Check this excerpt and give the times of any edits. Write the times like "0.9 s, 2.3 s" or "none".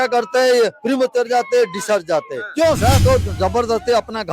3.0 s